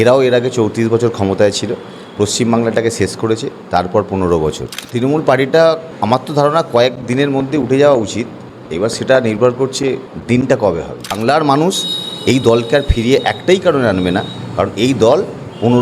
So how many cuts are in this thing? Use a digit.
2